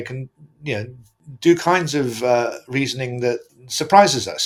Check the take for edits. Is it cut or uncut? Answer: uncut